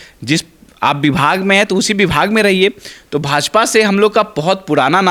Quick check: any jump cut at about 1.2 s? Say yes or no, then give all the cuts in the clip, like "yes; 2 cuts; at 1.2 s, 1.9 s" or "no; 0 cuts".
no; 0 cuts